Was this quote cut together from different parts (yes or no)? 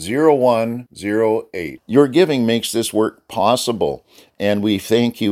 no